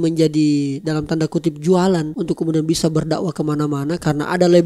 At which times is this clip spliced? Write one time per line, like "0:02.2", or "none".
0:02.1